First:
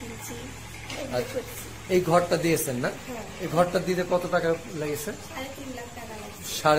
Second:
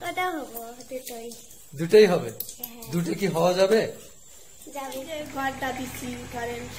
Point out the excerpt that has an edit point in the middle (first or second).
second